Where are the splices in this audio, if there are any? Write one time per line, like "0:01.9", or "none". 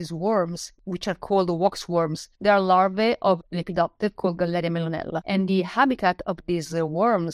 0:02.2
0:05.2